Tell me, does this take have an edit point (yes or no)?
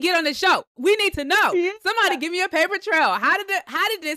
no